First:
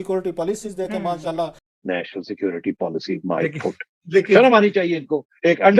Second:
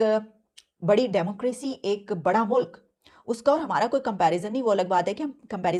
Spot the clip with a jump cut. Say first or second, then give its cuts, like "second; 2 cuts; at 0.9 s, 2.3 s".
first; 1 cut; at 1.7 s